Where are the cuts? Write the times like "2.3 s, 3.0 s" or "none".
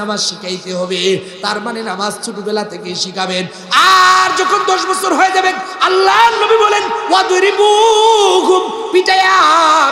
none